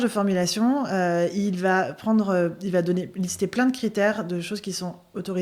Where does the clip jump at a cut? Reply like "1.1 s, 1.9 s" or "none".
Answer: none